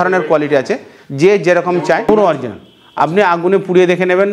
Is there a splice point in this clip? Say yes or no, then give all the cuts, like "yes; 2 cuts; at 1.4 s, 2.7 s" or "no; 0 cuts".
yes; 1 cut; at 2.1 s